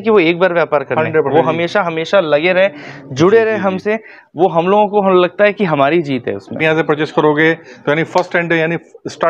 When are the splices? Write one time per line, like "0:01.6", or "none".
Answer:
0:06.6